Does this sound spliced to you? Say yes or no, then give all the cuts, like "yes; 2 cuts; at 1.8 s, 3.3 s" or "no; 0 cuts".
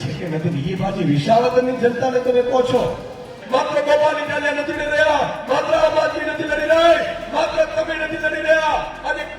yes; 1 cut; at 3.4 s